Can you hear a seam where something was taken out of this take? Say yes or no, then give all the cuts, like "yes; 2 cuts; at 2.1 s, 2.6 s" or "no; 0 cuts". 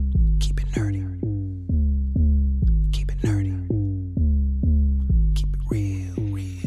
no; 0 cuts